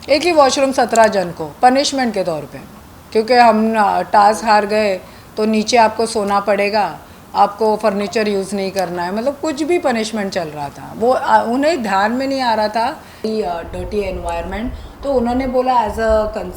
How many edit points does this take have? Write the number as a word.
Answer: one